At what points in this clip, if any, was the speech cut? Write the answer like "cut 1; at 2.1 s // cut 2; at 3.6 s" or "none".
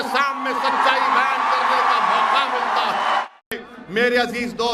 none